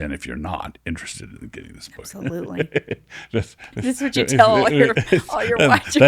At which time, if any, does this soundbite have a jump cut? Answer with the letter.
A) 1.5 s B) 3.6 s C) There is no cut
B